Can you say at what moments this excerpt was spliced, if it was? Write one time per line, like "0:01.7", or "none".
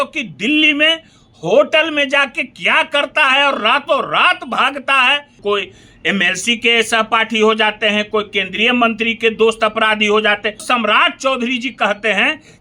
0:05.3
0:10.6